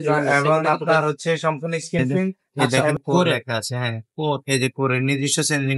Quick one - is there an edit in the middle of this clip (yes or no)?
yes